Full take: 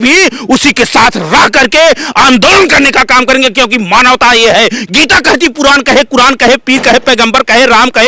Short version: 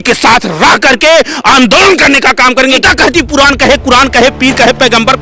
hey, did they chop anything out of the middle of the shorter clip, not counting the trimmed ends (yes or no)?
yes